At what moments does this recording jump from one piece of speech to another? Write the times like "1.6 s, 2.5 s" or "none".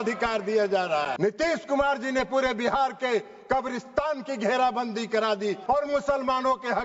1.1 s, 5.6 s